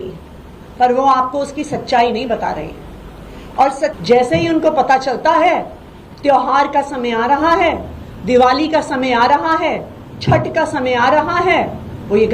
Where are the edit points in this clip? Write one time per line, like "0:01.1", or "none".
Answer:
0:04.0